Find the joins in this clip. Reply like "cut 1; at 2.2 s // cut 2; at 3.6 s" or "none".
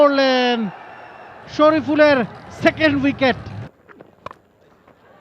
cut 1; at 3.7 s